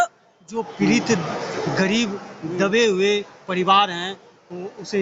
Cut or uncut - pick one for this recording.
uncut